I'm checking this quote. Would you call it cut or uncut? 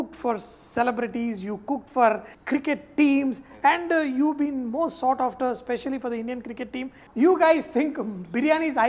cut